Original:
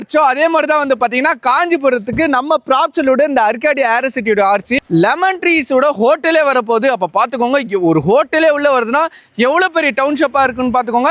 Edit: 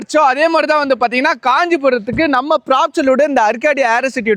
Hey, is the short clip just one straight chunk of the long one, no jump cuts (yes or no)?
yes